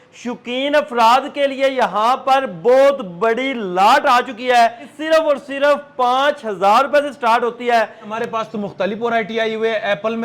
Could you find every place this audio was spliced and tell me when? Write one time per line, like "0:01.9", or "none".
0:04.9
0:08.1